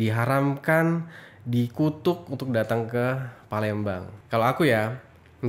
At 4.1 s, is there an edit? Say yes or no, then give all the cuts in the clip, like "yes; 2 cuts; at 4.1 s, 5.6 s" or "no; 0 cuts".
yes; 1 cut; at 4.1 s